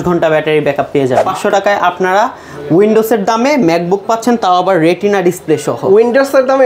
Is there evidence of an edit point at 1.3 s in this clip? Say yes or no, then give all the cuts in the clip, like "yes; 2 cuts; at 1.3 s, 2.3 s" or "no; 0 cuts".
yes; 1 cut; at 1.3 s